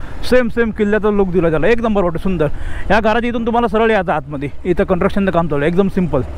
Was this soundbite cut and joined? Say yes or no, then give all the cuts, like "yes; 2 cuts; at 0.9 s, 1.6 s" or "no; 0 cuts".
no; 0 cuts